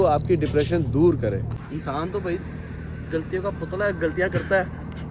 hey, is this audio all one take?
no; 1 cut; at 1.6 s

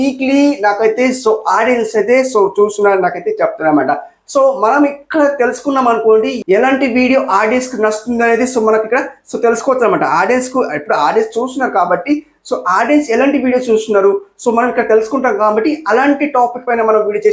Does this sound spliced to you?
no; 0 cuts

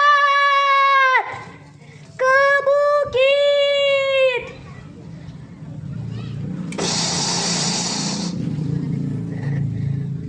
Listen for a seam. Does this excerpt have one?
no; 0 cuts

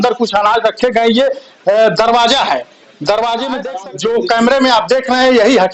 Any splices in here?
yes; 1 cut; at 3.8 s

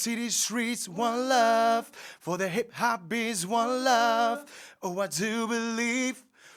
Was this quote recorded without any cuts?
yes; 0 cuts

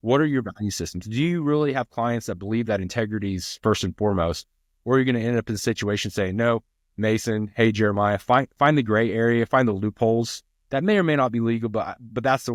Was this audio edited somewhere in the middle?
no; 0 cuts

